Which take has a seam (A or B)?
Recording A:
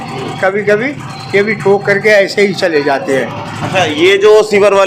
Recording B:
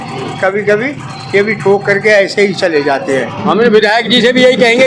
B